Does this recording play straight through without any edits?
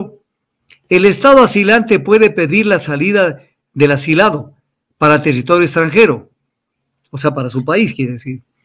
yes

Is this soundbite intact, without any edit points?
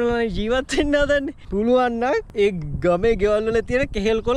no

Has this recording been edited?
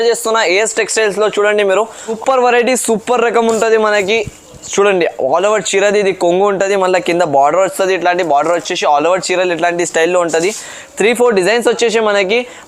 yes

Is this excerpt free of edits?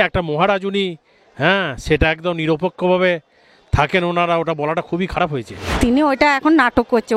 no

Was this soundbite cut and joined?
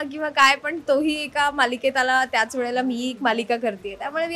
no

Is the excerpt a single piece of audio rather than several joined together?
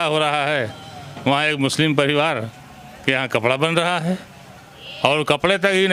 yes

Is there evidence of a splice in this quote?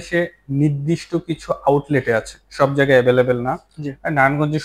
no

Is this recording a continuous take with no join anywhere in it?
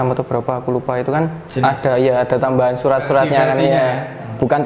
yes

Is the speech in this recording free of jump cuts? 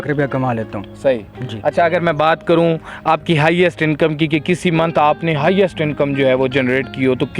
yes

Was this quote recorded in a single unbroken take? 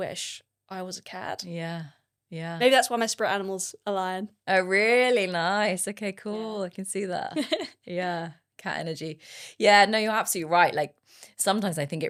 yes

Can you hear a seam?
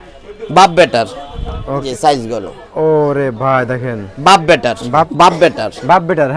yes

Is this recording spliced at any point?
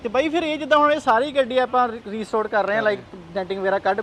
no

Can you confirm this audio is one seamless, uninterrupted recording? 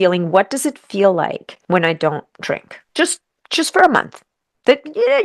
no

